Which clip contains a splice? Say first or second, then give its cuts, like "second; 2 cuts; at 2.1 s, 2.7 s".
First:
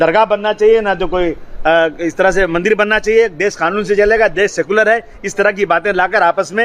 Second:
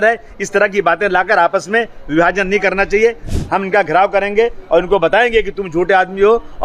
second; 1 cut; at 3.4 s